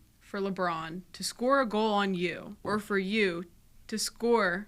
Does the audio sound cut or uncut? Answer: cut